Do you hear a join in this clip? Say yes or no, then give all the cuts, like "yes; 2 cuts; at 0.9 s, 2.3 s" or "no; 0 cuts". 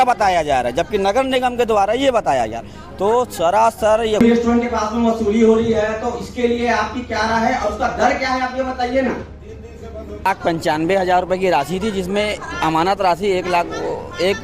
yes; 2 cuts; at 4.2 s, 10.3 s